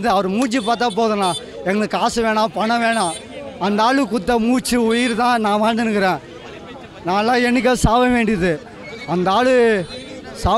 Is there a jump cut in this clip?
no; 0 cuts

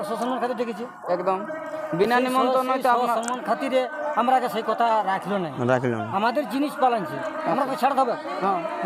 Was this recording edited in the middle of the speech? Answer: no; 0 cuts

